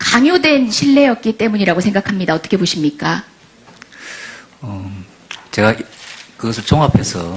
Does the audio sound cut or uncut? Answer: cut